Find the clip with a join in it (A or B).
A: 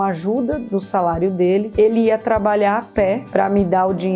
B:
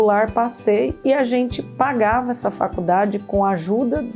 A